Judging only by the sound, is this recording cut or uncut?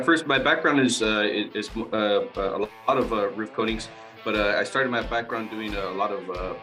uncut